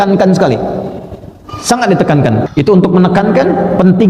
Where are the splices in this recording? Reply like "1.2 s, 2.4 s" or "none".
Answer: 2.5 s